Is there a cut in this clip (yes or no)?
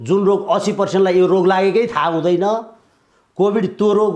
no